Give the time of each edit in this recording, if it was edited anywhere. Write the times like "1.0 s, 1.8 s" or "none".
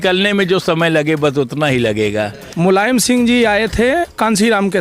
2.4 s